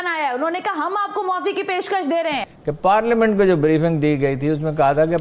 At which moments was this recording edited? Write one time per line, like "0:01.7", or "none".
0:02.5